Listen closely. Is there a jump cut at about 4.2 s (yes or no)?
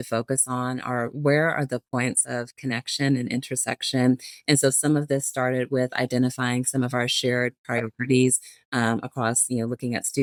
no